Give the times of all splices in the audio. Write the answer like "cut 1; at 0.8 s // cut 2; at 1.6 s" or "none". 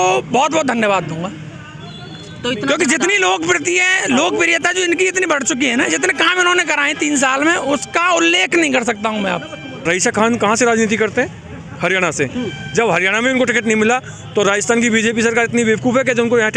cut 1; at 9.8 s